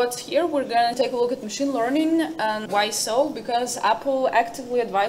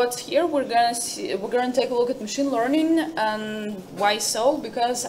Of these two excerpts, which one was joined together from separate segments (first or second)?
first